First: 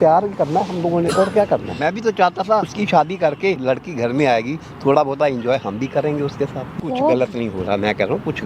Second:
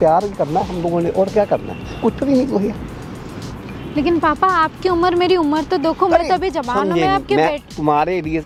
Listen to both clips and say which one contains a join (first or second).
first